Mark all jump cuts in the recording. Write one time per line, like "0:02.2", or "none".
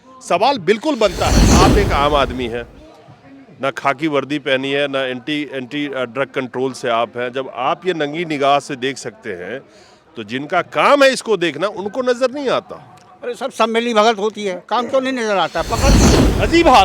0:01.4
0:16.0